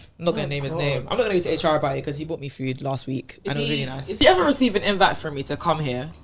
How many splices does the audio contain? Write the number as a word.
one